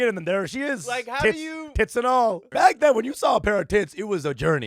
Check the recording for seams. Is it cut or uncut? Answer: cut